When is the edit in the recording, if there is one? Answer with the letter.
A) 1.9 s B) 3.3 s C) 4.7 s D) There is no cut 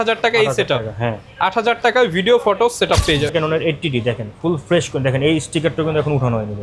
B